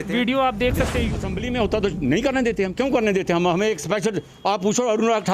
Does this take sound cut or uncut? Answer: cut